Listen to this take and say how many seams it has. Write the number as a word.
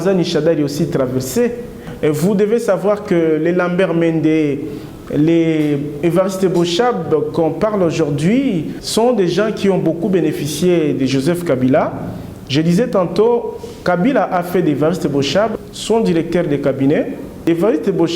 four